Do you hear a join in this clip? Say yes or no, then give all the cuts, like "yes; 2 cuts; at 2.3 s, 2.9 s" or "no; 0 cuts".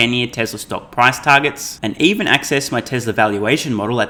no; 0 cuts